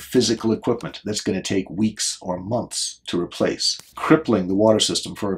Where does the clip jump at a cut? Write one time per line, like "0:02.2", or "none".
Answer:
0:03.9